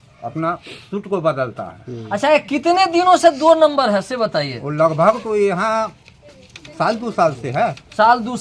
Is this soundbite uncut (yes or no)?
yes